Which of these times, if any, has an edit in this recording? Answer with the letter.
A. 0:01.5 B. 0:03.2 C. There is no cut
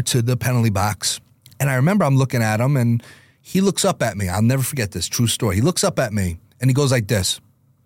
C